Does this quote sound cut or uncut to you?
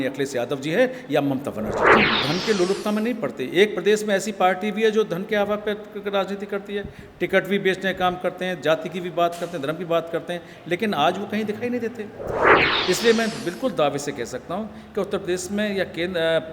cut